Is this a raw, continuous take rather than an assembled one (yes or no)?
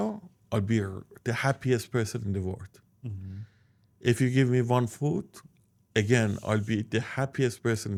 yes